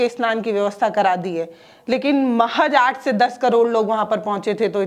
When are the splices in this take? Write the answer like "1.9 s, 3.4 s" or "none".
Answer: none